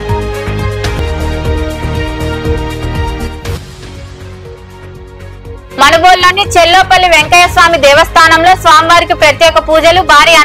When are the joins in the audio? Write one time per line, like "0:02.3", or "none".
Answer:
0:01.0